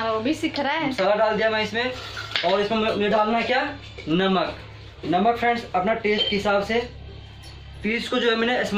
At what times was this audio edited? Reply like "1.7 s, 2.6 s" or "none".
7.8 s